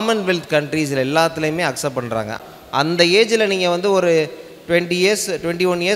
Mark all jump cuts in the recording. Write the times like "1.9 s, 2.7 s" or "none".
2.4 s

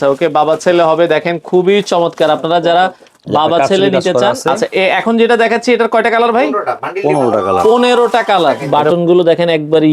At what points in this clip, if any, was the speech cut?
4.5 s, 8.6 s

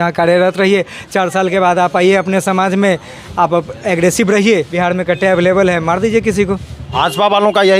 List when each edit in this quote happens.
4.7 s, 6.9 s

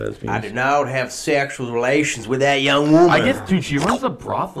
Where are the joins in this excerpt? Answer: none

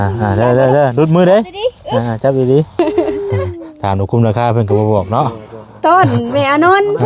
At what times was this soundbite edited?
2.8 s

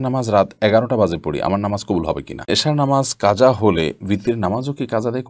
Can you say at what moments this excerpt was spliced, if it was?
2.5 s

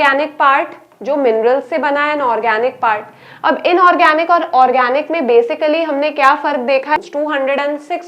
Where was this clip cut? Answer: 7.0 s

